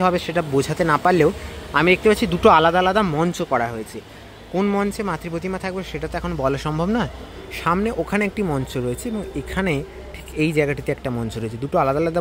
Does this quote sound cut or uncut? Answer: uncut